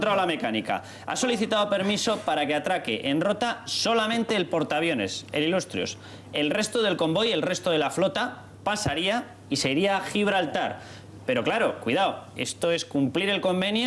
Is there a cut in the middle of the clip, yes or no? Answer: yes